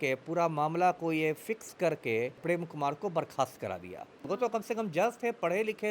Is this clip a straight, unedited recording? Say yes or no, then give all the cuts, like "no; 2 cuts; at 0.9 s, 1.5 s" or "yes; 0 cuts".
no; 2 cuts; at 2.4 s, 4.3 s